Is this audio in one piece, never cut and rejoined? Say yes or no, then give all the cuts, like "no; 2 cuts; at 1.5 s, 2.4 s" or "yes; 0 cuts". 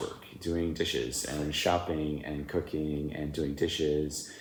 yes; 0 cuts